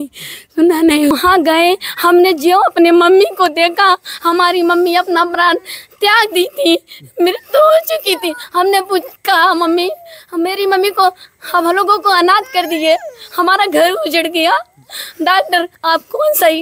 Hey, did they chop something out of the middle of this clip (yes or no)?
yes